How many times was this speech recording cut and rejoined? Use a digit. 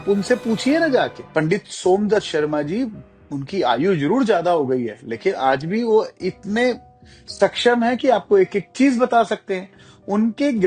1